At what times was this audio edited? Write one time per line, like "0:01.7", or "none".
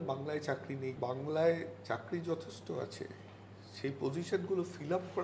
0:01.0